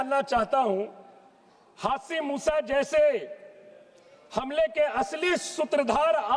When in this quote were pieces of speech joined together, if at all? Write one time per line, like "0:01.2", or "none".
none